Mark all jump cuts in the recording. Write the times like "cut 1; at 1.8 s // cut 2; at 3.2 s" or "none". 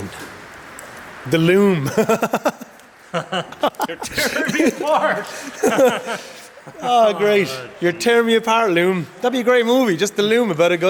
none